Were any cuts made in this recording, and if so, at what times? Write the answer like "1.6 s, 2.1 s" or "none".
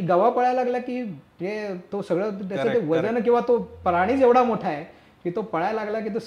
none